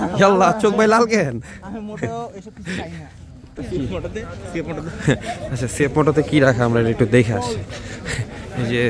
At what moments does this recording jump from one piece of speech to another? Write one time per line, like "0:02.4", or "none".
0:03.6